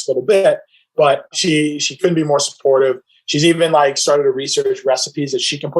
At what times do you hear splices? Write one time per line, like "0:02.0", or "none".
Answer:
0:01.3